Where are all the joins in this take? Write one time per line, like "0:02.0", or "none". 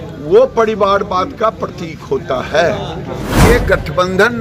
0:03.3